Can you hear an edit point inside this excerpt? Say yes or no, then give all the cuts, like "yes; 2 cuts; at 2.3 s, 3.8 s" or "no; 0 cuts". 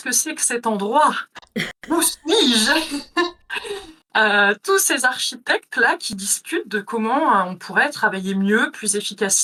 no; 0 cuts